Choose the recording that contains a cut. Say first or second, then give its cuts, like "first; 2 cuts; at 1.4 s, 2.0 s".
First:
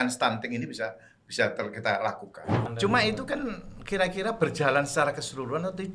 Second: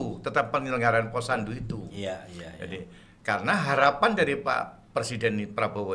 first; 1 cut; at 2.7 s